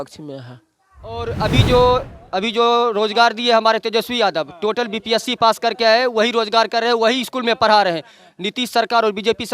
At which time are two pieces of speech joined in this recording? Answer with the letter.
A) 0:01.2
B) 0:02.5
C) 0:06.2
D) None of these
A